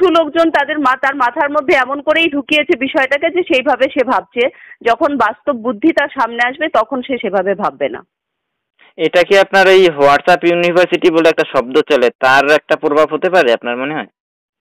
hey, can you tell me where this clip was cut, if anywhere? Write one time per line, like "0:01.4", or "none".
none